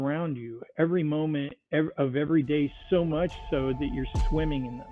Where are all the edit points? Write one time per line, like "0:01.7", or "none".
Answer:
none

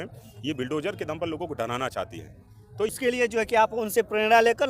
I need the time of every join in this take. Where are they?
0:02.9

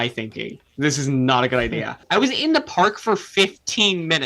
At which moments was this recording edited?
0:02.0

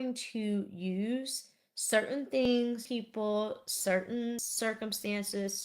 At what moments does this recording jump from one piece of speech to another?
0:02.4
0:04.5

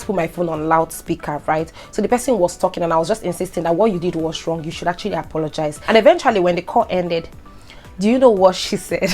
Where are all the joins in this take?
0:05.8

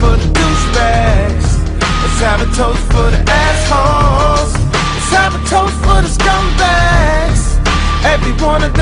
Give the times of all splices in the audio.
none

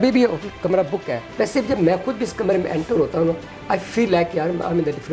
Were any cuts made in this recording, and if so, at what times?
0:01.2

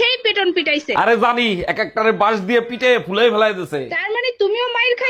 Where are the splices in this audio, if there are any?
none

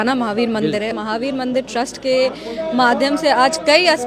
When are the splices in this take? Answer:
0:00.9

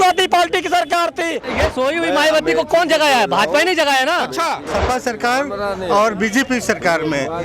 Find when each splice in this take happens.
0:01.6
0:04.7

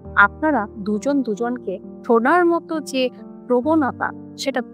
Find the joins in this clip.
0:01.9

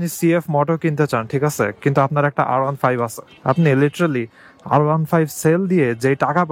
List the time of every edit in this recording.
none

